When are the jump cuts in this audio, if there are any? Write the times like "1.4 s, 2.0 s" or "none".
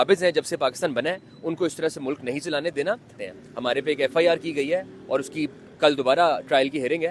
3.1 s